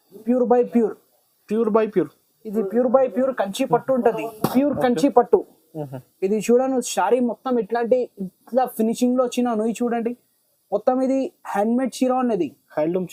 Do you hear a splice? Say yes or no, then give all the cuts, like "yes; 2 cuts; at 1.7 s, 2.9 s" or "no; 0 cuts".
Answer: no; 0 cuts